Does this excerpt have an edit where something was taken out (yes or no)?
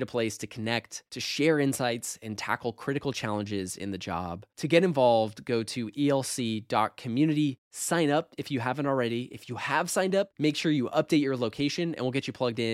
no